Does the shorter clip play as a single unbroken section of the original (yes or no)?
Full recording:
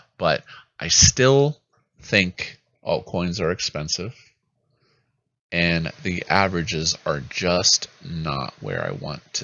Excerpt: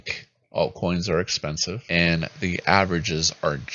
no